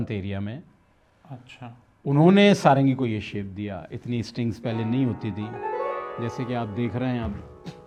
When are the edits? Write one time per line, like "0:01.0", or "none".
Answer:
none